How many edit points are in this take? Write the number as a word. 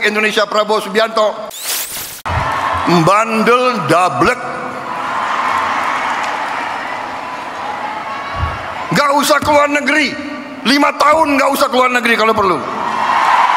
one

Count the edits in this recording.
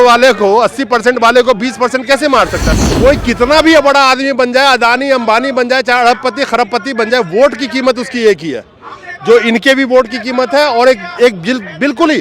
one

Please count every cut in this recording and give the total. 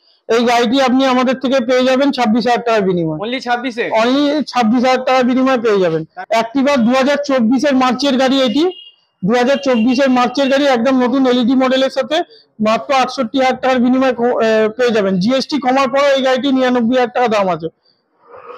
one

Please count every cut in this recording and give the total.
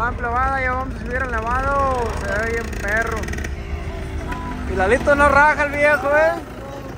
zero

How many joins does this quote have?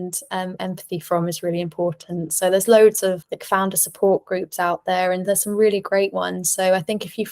one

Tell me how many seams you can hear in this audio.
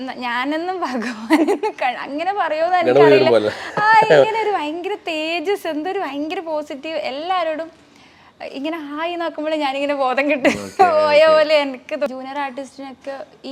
one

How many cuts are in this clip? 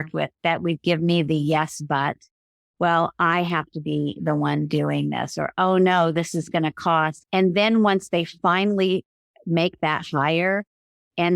one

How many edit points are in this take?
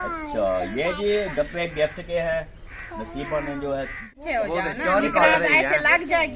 one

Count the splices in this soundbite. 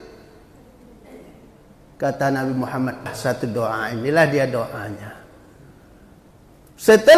one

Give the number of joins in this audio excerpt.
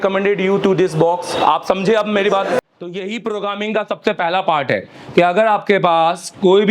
one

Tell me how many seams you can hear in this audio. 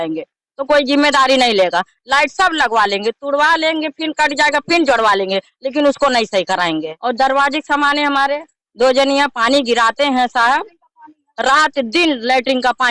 one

